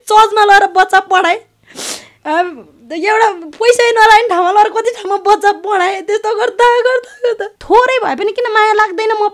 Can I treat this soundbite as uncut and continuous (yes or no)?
no